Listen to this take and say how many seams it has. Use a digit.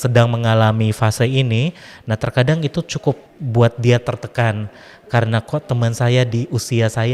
1